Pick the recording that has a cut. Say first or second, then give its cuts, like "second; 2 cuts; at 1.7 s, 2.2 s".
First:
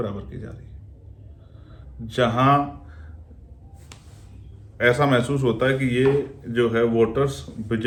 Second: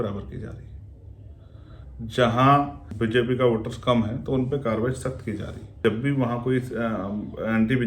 second; 2 cuts; at 2.8 s, 5.8 s